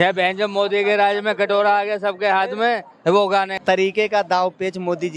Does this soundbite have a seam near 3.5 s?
yes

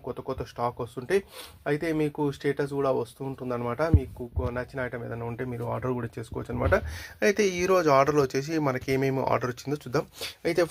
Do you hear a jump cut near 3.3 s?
no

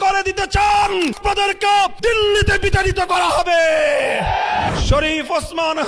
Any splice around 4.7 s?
yes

